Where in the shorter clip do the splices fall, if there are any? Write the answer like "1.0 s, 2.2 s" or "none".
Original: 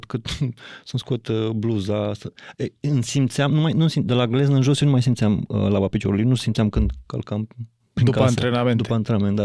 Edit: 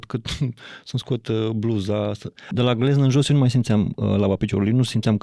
2.5 s